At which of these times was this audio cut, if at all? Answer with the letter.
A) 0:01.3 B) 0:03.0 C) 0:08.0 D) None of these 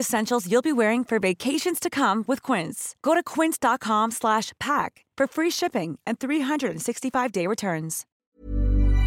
C